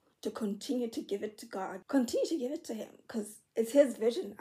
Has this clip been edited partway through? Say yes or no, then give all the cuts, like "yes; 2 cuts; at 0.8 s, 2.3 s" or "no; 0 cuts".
yes; 1 cut; at 1.8 s